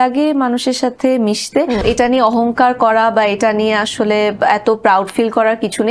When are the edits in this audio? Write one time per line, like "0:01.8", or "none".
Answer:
0:01.8